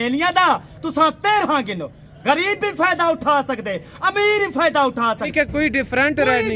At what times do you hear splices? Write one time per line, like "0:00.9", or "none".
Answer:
0:05.3